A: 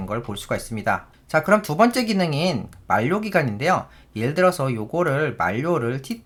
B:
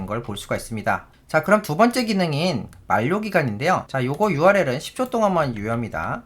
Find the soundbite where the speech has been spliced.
B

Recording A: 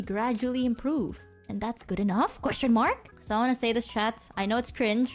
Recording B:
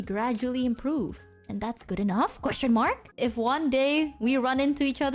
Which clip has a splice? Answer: B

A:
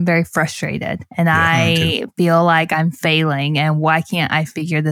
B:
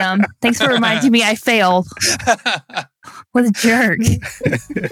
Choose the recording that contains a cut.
A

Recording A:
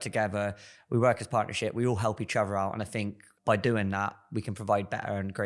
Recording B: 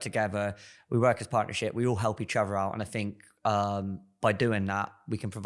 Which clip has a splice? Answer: A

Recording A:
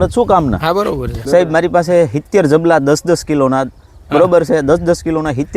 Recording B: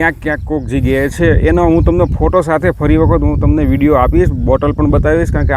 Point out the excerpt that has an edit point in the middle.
A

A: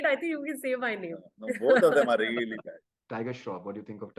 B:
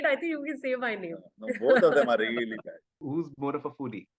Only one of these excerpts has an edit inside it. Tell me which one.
A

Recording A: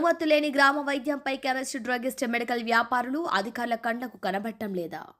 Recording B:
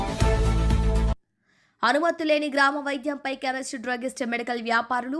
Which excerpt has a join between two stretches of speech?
B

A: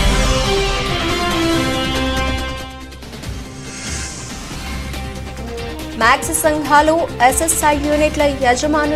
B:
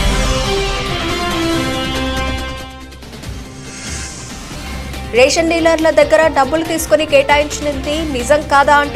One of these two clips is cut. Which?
B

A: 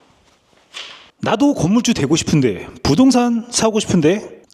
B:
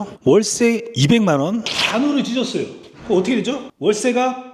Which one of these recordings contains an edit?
A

